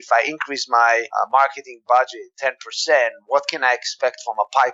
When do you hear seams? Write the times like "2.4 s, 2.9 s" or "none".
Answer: 1.1 s, 2.2 s